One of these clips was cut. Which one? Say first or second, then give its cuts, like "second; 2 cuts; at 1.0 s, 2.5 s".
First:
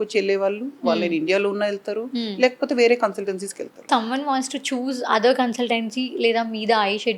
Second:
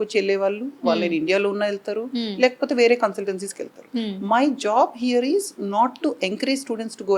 first; 1 cut; at 3.9 s